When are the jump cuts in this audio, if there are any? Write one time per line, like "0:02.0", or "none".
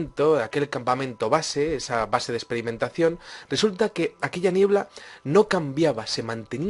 0:03.3